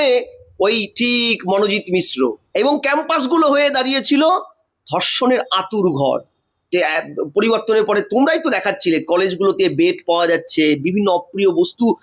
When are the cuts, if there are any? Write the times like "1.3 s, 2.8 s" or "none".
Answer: 2.4 s